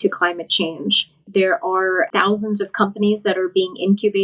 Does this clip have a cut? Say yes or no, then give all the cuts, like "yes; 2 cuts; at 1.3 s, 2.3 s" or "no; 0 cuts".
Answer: yes; 2 cuts; at 1.2 s, 2.1 s